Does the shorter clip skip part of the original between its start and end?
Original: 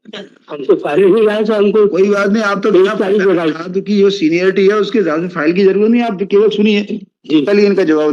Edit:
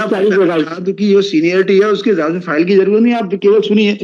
no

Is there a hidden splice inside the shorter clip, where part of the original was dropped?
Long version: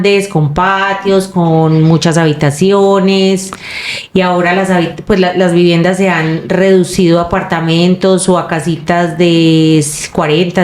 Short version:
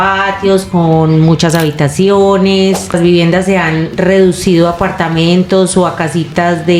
yes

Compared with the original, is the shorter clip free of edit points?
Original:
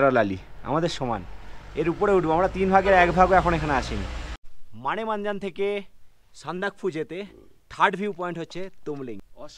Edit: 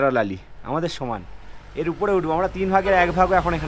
yes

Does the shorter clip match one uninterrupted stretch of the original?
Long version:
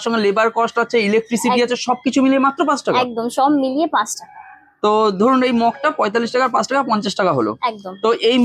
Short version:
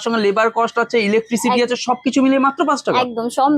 yes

